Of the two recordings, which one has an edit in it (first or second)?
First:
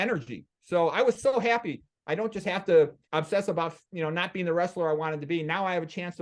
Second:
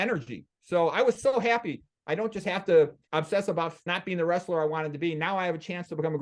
second